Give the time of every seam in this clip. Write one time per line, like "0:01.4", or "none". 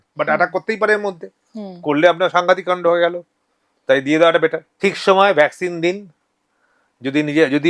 0:04.7